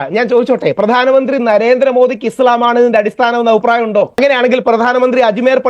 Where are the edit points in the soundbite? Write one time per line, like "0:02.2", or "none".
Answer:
0:04.1

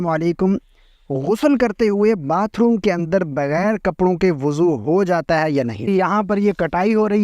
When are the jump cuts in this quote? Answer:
0:05.9

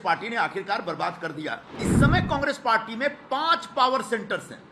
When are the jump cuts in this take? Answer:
0:01.8

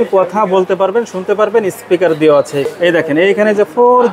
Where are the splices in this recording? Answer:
0:02.7

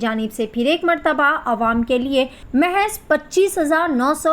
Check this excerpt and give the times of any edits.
0:02.4

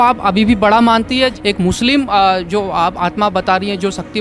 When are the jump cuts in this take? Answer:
0:01.3

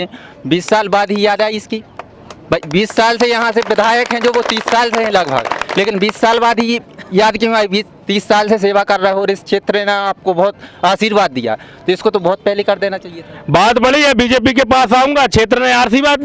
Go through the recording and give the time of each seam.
none

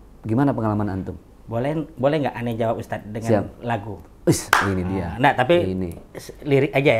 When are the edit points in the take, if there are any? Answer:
none

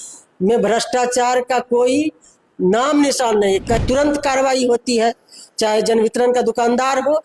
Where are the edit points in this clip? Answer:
0:03.8

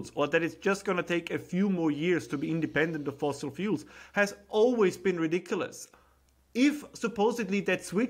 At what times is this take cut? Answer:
0:05.8

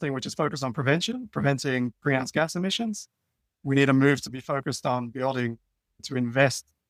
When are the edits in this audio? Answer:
none

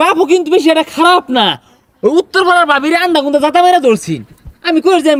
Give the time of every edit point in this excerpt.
none

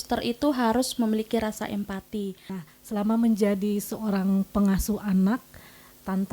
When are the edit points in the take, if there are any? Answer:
0:02.6

